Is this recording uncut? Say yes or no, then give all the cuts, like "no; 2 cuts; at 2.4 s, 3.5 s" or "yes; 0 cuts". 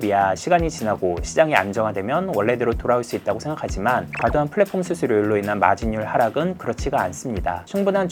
yes; 0 cuts